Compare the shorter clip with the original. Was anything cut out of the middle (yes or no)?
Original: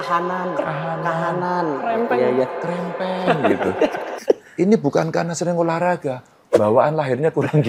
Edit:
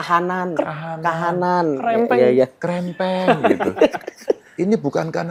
no